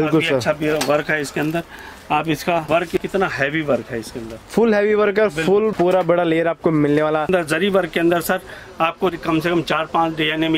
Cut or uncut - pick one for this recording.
cut